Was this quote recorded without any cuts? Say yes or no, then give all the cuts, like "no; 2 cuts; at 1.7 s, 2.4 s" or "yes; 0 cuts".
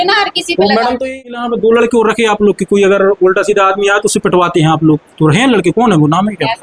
no; 1 cut; at 1.1 s